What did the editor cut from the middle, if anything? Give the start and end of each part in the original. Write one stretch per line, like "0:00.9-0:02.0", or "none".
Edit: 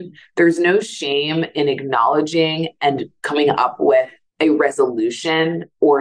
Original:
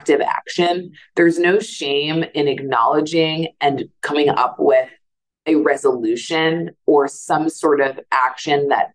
0:05.0-0:05.3